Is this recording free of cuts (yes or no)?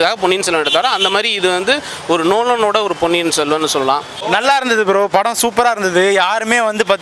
no